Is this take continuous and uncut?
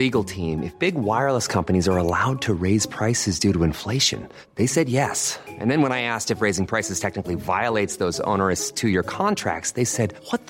yes; 0 cuts

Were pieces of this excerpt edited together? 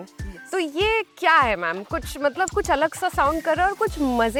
no; 0 cuts

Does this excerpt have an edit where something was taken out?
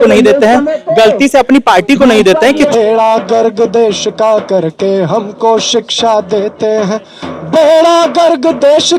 yes; 1 cut; at 2.7 s

